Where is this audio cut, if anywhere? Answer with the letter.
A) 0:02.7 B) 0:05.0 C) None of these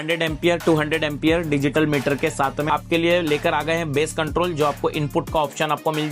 A